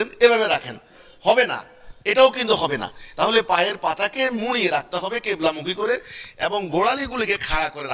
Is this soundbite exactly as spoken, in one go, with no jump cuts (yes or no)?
yes